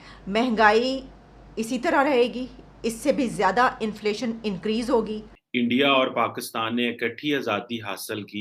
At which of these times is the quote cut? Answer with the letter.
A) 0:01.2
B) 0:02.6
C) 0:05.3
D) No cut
C